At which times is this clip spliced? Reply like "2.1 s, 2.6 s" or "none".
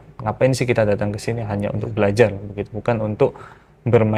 none